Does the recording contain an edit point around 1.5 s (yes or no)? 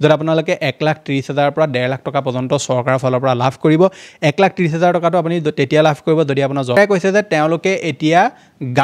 no